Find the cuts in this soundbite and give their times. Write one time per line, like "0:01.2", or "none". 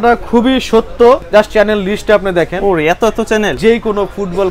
0:01.2
0:03.6